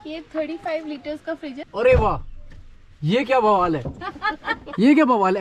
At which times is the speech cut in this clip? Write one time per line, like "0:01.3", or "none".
0:01.6